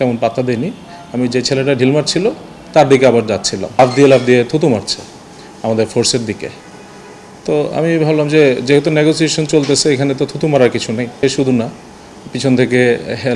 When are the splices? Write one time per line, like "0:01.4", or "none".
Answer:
0:03.8
0:11.2